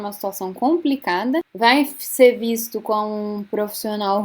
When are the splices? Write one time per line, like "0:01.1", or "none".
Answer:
0:01.5

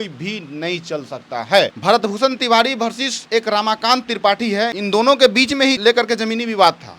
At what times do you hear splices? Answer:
0:01.8
0:03.1
0:04.7
0:05.8

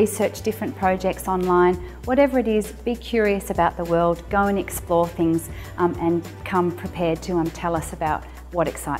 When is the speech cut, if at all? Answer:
0:01.1

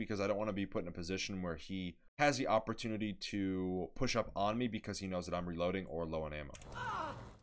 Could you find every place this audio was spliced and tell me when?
0:02.0

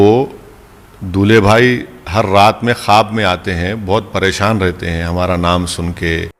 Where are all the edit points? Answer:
none

